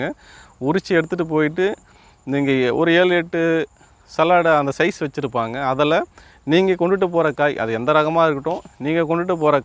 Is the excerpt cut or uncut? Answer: uncut